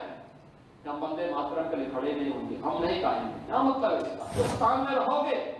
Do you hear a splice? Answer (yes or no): yes